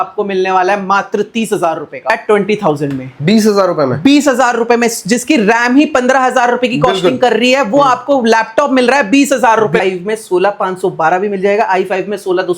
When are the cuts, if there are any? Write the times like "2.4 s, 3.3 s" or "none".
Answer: 2.1 s, 9.8 s